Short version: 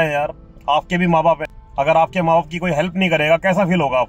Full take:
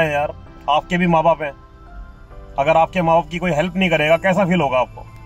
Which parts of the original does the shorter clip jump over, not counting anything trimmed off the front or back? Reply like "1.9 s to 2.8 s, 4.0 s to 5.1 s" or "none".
1.6 s to 2.4 s

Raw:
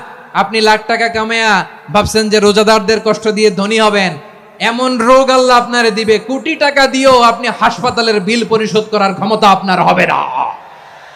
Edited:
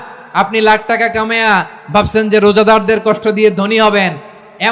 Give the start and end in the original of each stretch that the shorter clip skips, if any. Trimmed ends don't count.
none

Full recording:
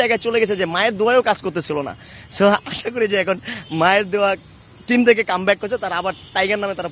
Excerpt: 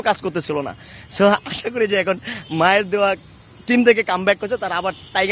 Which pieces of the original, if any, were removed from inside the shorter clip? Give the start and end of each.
none

